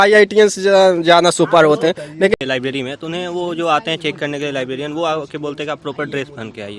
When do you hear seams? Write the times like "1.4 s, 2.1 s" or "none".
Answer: 2.3 s